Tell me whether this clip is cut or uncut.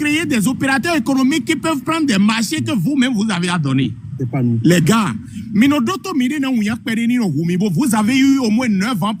uncut